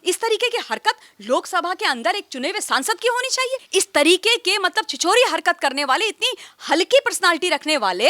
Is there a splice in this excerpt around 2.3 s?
no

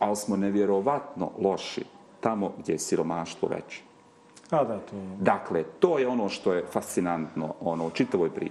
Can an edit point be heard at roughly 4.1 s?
no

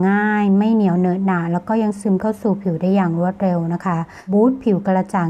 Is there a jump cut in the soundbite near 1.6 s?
no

